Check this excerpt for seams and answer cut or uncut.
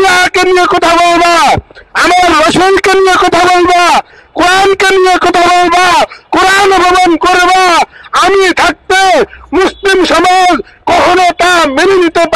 uncut